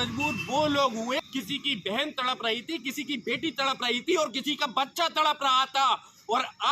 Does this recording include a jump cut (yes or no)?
yes